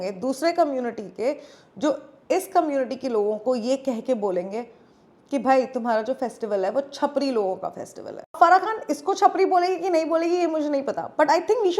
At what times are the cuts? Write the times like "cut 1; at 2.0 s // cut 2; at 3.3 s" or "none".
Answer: cut 1; at 8.3 s